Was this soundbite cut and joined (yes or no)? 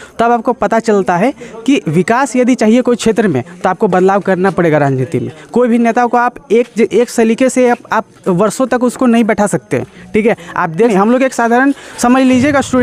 no